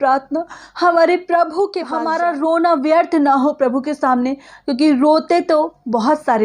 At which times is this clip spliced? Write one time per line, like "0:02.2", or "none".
0:01.9